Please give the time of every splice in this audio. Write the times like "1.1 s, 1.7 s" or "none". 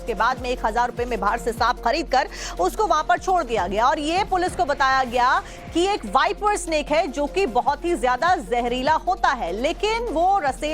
7.6 s